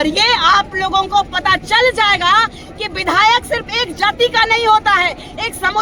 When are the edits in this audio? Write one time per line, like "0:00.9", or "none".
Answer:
none